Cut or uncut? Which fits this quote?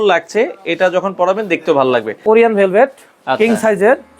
cut